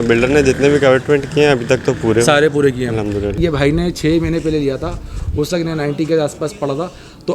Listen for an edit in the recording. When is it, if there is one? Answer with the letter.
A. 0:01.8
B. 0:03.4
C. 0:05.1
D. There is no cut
B